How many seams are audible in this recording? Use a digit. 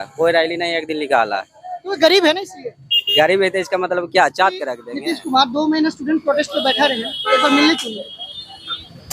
1